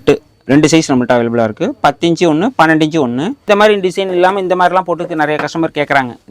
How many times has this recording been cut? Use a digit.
1